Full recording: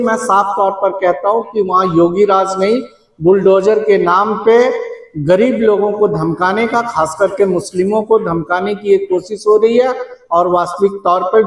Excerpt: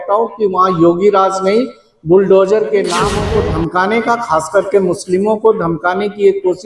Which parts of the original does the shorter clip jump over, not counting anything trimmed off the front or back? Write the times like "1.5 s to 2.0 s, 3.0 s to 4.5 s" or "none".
4.3 s to 5.8 s